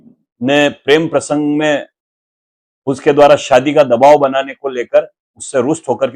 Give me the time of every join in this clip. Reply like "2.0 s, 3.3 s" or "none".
none